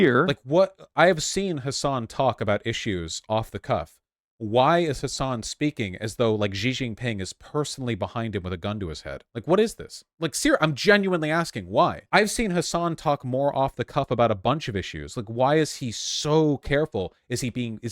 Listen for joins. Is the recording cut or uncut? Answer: cut